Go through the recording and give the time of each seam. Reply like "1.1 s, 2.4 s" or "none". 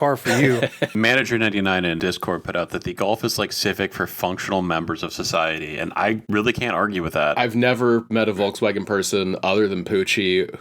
0.9 s, 2.0 s, 6.2 s, 7.3 s